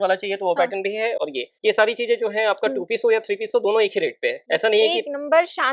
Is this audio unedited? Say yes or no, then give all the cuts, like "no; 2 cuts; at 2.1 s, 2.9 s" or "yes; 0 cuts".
yes; 0 cuts